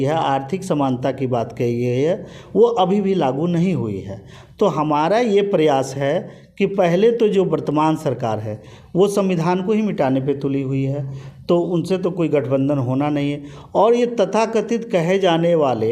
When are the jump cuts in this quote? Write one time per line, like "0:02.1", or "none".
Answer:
none